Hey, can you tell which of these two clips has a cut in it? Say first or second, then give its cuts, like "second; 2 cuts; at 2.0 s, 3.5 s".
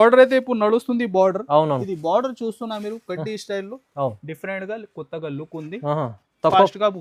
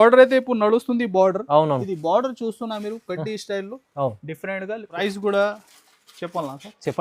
second; 1 cut; at 5.0 s